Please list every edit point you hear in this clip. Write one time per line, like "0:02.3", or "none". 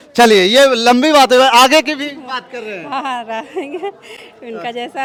none